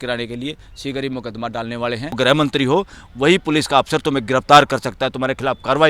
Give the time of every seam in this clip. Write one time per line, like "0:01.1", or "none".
0:02.2